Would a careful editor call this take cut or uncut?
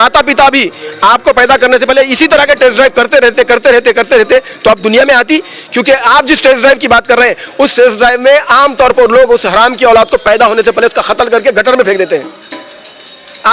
uncut